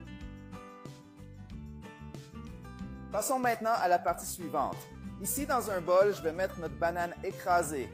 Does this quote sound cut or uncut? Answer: uncut